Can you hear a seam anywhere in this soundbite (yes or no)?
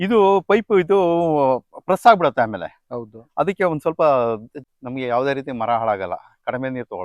yes